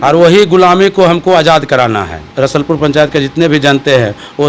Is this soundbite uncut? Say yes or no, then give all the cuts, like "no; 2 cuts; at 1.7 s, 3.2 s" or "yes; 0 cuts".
no; 1 cut; at 2.2 s